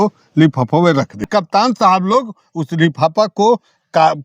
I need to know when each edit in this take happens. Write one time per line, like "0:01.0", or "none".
0:01.3